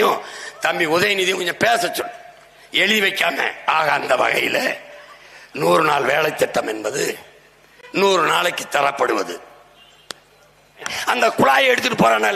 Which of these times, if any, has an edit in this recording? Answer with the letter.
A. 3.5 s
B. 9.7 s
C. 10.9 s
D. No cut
C